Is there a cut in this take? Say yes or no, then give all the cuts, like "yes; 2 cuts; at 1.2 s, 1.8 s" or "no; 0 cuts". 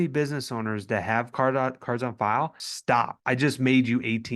yes; 1 cut; at 2.7 s